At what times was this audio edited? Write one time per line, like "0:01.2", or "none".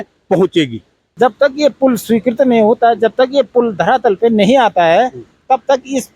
0:01.0